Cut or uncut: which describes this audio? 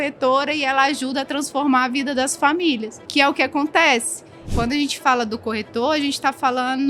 cut